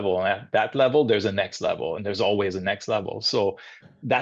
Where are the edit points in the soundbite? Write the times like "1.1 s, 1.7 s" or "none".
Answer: none